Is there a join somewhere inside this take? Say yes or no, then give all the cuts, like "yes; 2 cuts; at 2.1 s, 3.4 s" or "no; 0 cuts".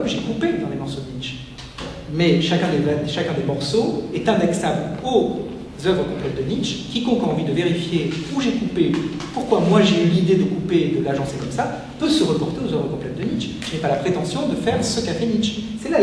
no; 0 cuts